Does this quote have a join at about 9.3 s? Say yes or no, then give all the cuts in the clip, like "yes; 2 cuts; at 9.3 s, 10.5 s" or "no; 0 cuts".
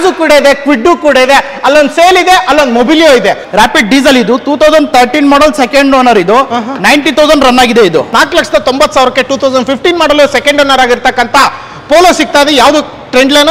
no; 2 cuts; at 3.4 s, 8.1 s